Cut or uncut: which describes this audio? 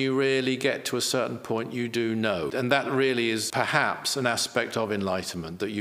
cut